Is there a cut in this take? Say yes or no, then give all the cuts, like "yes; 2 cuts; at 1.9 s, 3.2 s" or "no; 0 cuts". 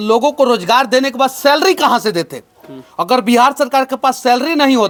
no; 0 cuts